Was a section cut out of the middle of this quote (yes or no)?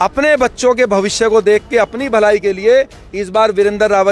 no